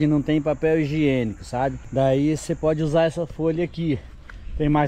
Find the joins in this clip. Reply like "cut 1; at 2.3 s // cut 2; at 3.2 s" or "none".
none

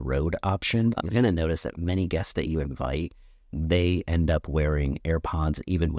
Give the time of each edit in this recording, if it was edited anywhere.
cut 1; at 1.0 s

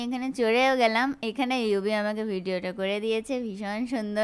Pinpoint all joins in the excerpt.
none

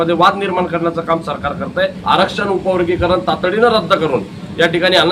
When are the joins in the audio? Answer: cut 1; at 2.0 s

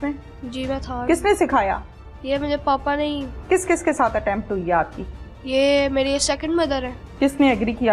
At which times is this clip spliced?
cut 1; at 3.4 s // cut 2; at 7.0 s

